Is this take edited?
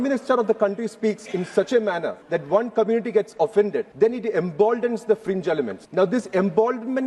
yes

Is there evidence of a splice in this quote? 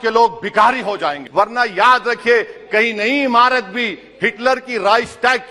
yes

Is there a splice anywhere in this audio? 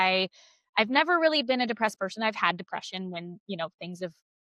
no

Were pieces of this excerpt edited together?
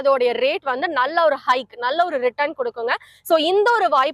no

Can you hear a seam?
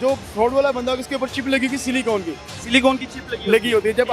no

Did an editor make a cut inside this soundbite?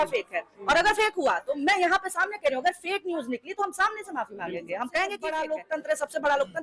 yes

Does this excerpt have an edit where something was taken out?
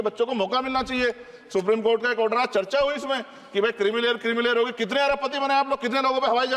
no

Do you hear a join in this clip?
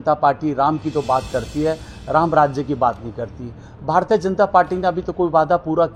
no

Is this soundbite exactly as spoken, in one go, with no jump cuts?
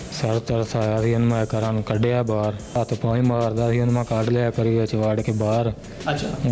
no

